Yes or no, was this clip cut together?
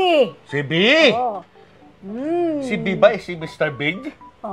no